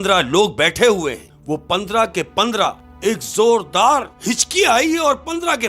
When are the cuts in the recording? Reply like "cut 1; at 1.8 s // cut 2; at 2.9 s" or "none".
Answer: cut 1; at 1.3 s // cut 2; at 2.9 s // cut 3; at 4.1 s